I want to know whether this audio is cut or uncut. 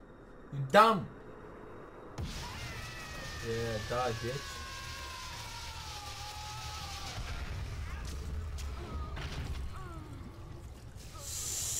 uncut